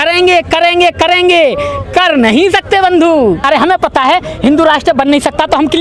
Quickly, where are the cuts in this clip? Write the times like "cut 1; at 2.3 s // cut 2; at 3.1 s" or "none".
cut 1; at 3.4 s